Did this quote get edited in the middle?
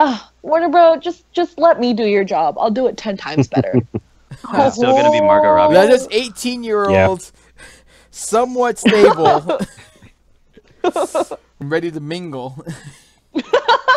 yes; 1 cut; at 11.5 s

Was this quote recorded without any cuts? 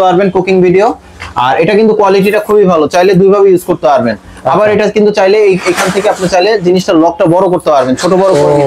yes; 0 cuts

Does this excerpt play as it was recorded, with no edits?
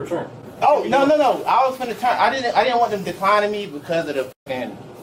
yes; 0 cuts

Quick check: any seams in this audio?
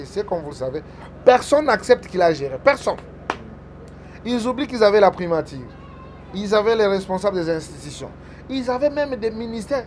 no; 0 cuts

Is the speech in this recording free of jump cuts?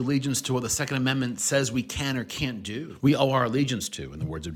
no; 1 cut; at 2.9 s

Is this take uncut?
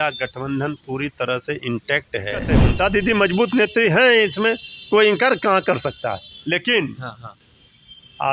no; 1 cut; at 2.5 s

